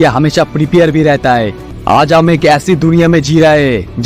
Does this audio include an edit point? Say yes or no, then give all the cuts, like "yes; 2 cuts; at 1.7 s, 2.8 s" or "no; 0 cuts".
yes; 1 cut; at 1.7 s